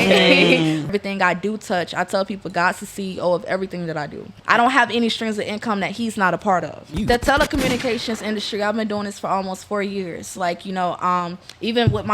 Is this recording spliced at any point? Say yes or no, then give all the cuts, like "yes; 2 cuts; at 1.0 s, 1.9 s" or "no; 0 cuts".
yes; 3 cuts; at 0.9 s, 4.4 s, 6.9 s